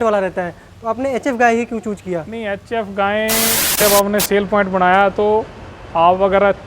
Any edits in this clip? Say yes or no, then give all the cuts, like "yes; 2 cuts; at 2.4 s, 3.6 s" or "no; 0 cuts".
yes; 1 cut; at 3.8 s